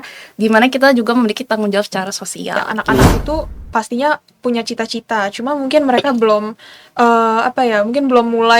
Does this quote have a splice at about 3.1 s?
yes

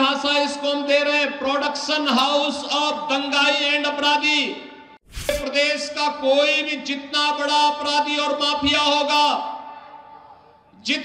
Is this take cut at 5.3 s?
yes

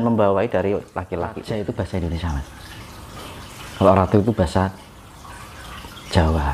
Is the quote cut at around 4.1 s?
no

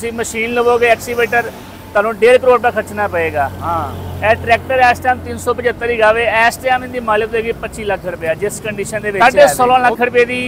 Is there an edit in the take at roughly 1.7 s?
no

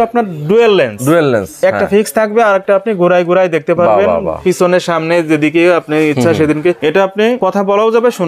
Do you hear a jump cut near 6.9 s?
yes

